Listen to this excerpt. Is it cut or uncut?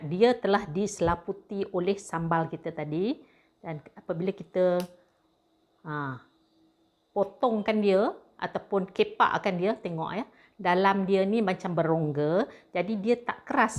uncut